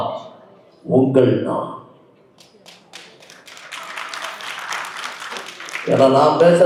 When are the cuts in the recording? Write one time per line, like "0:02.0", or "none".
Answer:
none